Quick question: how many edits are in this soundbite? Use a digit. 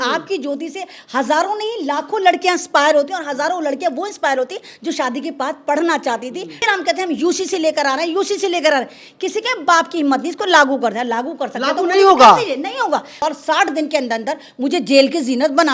2